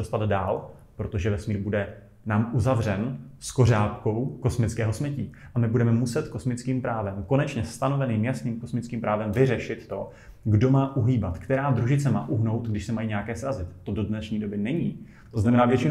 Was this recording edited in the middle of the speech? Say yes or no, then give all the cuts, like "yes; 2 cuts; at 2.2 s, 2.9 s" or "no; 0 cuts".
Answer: no; 0 cuts